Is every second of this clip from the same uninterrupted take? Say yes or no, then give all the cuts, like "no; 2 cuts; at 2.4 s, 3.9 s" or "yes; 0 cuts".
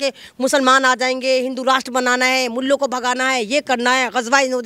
yes; 0 cuts